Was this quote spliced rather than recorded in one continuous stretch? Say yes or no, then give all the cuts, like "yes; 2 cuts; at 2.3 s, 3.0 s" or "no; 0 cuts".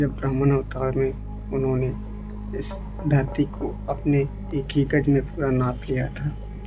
no; 0 cuts